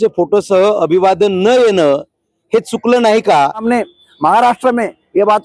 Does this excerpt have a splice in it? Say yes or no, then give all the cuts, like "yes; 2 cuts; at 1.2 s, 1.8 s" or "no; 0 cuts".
yes; 1 cut; at 3.6 s